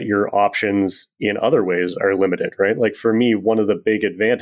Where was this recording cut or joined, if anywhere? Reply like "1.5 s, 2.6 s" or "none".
none